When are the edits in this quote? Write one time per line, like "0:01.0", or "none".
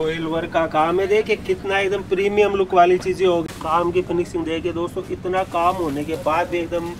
0:03.4